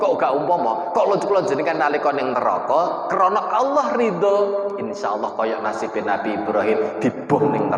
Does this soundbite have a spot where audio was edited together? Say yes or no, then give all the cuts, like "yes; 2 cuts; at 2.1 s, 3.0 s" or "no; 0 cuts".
no; 0 cuts